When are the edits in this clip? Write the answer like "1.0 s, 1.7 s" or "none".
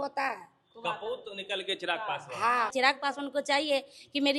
2.7 s